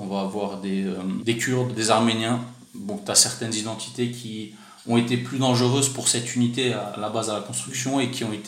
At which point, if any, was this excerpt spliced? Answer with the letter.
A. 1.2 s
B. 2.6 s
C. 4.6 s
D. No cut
A